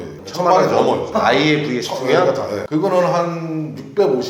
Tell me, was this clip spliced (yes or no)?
yes